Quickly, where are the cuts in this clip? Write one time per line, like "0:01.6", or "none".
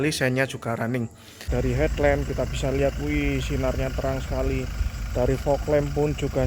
0:01.5